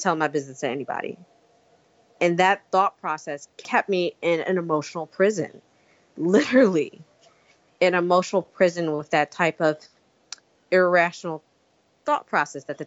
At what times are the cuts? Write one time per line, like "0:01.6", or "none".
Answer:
0:03.6